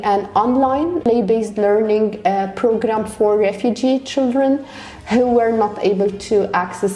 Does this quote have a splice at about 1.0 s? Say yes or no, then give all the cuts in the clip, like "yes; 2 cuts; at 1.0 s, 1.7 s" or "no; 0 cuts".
yes; 1 cut; at 1.0 s